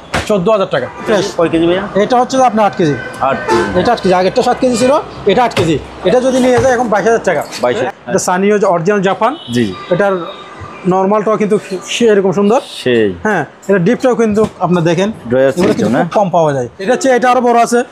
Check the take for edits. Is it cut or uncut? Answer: cut